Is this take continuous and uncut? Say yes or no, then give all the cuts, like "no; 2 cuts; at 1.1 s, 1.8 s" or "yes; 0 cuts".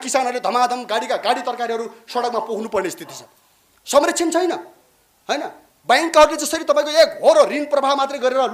yes; 0 cuts